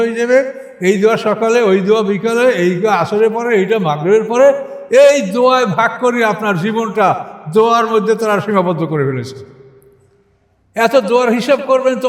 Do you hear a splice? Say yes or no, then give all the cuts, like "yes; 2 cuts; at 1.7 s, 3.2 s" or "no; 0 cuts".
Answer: no; 0 cuts